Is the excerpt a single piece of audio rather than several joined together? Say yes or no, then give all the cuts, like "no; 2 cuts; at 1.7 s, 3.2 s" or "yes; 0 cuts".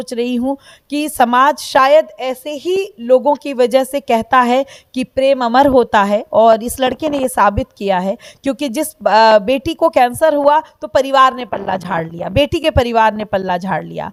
yes; 0 cuts